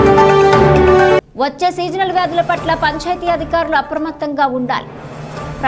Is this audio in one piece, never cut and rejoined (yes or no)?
no